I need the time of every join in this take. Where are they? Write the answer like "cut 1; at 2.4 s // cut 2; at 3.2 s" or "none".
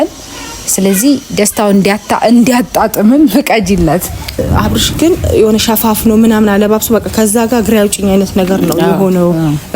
cut 1; at 4.4 s